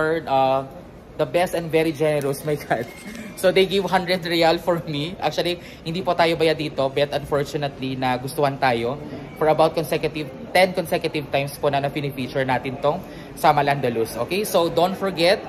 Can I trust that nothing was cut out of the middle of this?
yes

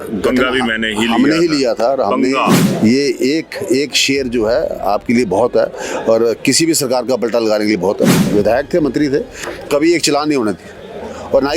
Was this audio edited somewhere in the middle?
yes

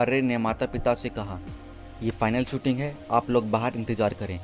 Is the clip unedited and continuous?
yes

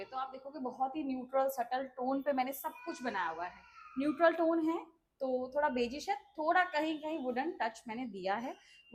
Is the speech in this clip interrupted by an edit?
no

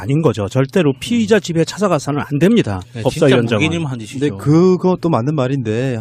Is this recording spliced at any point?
yes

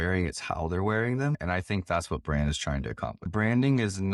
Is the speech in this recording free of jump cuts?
no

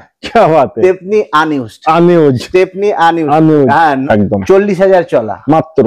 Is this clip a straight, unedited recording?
no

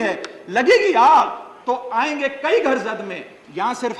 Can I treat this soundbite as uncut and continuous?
yes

